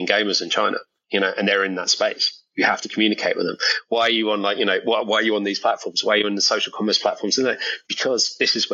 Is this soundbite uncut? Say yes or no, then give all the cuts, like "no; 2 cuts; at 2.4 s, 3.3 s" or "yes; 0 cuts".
no; 1 cut; at 0.9 s